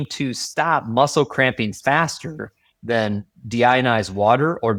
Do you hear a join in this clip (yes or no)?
no